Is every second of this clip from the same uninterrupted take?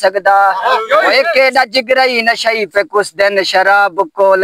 yes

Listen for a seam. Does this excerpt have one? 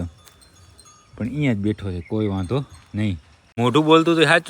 yes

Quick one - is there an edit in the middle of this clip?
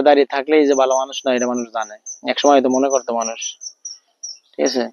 no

